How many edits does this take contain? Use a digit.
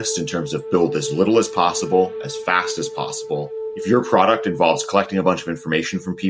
1